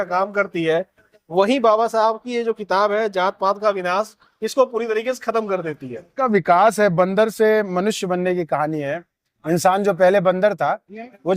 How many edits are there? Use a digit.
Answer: 1